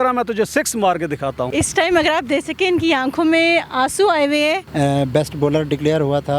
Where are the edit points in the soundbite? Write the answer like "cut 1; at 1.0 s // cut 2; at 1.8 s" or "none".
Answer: cut 1; at 1.5 s // cut 2; at 4.7 s

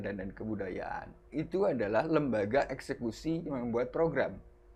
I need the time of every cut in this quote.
none

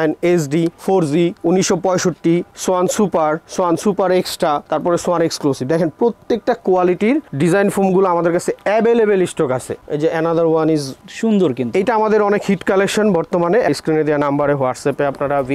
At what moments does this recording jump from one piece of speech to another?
cut 1; at 9.8 s // cut 2; at 13.7 s

